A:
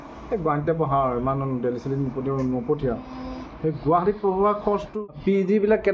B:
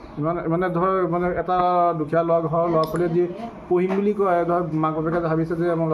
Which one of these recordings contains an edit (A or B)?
A